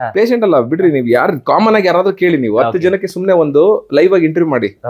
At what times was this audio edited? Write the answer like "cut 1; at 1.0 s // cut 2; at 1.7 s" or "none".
none